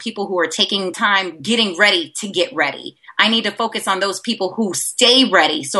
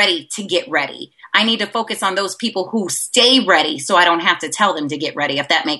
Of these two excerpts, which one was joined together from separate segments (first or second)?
first